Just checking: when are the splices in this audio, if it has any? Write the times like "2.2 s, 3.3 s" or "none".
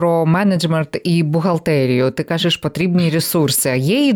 none